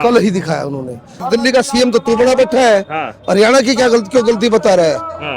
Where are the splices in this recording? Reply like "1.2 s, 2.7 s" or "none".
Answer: 1.2 s

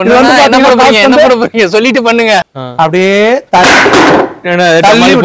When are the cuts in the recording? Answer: 2.6 s

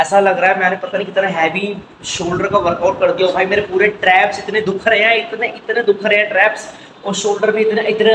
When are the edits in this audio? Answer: none

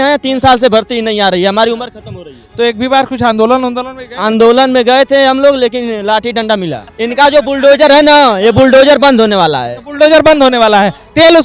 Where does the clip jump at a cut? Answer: 6.9 s

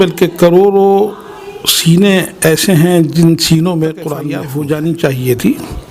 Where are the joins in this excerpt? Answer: 4.2 s

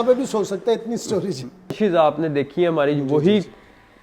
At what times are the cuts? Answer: 1.8 s

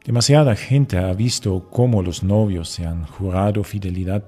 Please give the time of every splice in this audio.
2.2 s

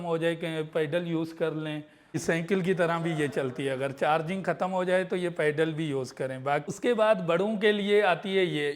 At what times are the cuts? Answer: 2.2 s, 6.7 s

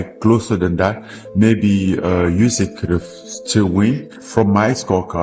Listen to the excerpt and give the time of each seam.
4.1 s

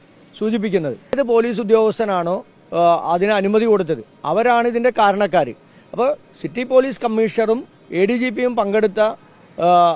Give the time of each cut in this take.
1.2 s

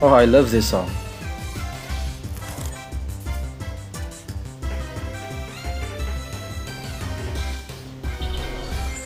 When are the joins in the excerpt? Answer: none

